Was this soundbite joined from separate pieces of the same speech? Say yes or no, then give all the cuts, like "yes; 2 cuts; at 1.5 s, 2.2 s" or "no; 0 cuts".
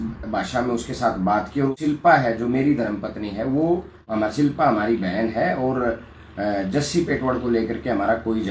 yes; 2 cuts; at 2.0 s, 3.9 s